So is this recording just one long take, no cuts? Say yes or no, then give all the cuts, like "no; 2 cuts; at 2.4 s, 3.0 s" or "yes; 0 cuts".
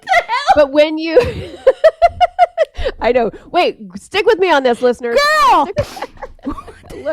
no; 1 cut; at 5.7 s